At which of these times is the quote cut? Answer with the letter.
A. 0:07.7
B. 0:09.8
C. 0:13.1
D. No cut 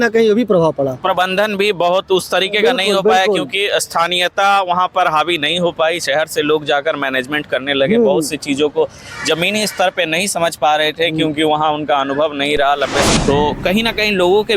C